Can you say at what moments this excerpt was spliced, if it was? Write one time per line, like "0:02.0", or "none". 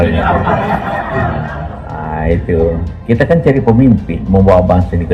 0:02.9

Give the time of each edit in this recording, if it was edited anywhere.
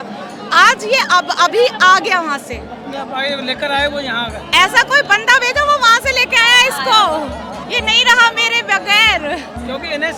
none

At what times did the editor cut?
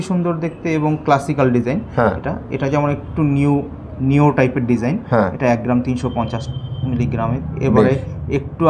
none

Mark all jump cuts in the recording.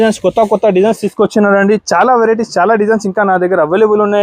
none

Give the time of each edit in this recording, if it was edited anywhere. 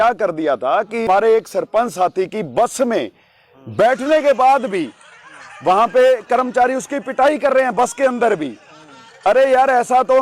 0:01.1

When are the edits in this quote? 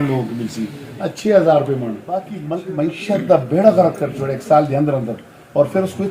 0:02.4

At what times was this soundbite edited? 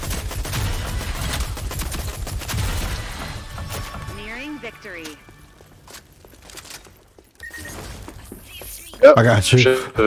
none

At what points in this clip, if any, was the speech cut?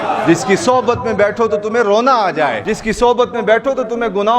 0:02.6

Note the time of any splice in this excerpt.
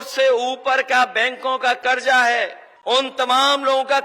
0:02.7

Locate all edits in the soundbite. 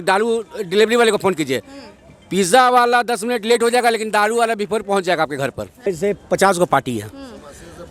0:05.7

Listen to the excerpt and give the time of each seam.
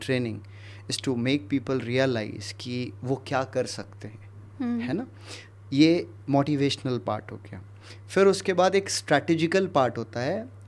none

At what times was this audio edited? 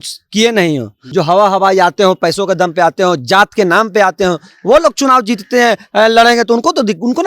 0:01.0

